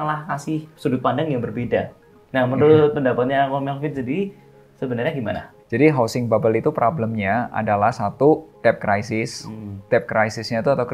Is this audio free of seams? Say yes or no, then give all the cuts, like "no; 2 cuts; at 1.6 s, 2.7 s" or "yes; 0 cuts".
no; 1 cut; at 5.5 s